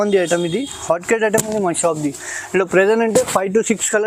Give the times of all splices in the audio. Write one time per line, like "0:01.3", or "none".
none